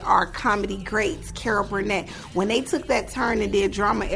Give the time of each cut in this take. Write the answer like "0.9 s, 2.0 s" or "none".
none